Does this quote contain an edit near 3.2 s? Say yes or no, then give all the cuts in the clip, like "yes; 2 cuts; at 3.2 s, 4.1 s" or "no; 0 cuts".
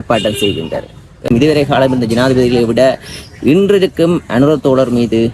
no; 1 cut; at 1.3 s